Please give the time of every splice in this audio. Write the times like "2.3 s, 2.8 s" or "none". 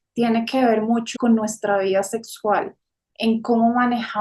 1.1 s